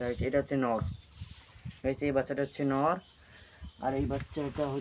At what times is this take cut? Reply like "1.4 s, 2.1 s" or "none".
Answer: none